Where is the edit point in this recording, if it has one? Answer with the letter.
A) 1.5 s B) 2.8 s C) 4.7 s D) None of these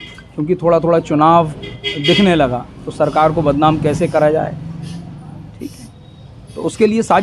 D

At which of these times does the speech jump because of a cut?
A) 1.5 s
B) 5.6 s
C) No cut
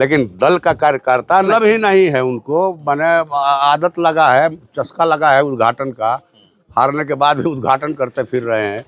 A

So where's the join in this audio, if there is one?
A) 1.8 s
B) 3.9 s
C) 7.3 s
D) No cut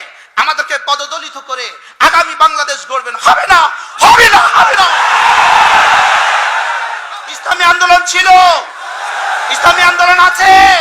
C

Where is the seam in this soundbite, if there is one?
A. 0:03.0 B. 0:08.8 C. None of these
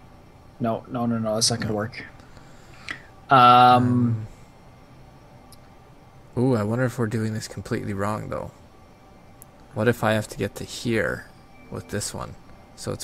B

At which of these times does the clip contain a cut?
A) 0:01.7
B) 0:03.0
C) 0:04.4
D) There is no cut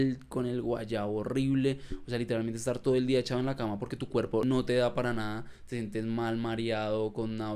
C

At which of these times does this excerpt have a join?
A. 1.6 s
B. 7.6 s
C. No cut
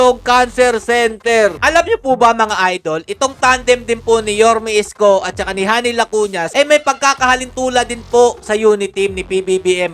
A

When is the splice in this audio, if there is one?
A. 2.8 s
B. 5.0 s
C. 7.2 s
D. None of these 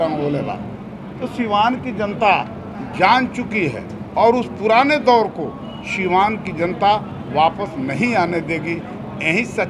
D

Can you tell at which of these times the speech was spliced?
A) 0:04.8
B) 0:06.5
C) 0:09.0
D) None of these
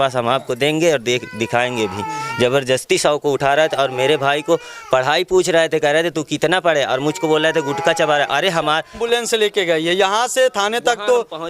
C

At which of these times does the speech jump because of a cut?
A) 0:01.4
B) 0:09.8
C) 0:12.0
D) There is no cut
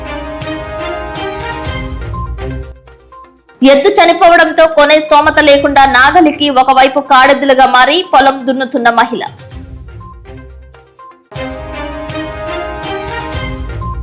D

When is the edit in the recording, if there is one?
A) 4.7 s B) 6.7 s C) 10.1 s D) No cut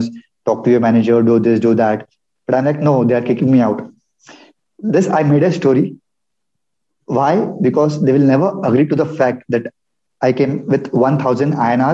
D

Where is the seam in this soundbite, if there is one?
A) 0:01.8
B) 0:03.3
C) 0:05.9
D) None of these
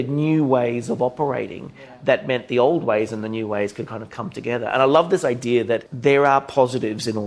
C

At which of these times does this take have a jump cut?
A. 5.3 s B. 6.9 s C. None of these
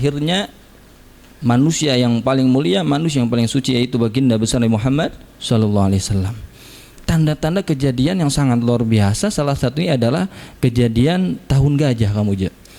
B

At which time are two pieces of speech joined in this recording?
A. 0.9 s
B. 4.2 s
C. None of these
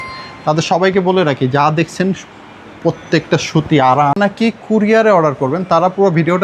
B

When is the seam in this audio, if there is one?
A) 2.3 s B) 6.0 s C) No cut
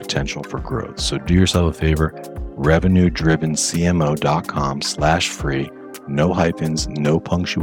C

